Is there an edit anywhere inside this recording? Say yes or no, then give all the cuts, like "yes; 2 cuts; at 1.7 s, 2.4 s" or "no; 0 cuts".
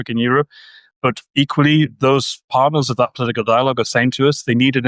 no; 0 cuts